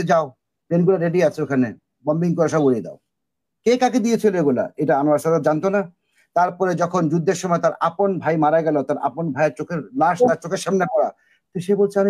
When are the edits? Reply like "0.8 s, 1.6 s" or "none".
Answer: none